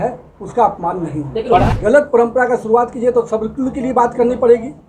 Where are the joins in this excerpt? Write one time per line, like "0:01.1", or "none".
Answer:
0:01.7